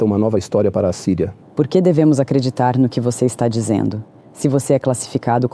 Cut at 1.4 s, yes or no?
yes